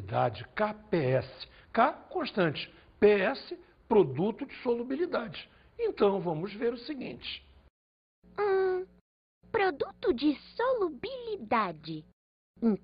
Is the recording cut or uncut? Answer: cut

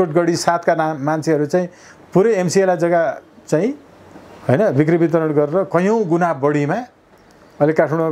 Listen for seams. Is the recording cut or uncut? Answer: uncut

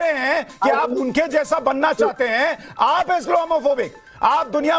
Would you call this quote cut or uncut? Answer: uncut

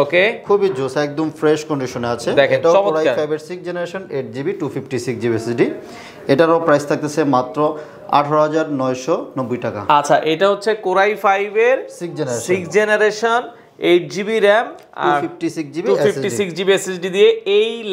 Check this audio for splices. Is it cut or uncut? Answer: uncut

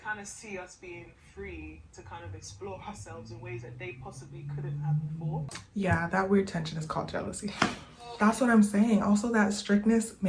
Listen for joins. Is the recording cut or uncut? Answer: cut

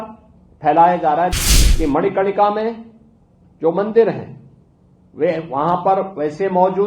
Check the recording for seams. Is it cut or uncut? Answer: cut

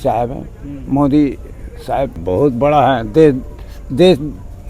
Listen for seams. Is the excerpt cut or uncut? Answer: cut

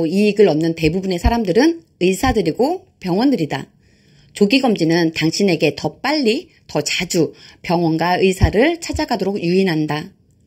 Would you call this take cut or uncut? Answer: uncut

